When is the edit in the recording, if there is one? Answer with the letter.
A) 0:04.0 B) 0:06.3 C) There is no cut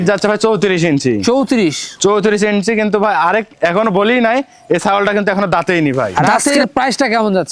B